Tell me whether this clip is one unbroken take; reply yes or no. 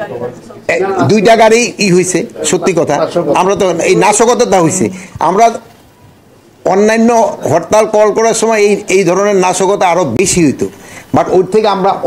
yes